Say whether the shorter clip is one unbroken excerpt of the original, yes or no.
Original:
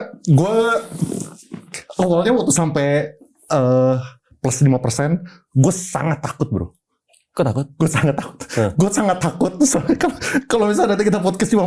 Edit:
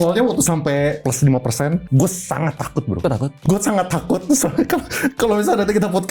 no